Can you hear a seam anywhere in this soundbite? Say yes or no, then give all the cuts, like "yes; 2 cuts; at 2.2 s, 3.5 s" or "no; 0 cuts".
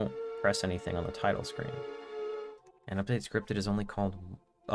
yes; 1 cut; at 2.5 s